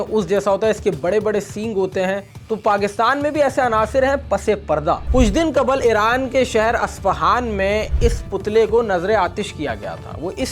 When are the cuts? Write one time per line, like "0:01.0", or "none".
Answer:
0:02.3
0:05.1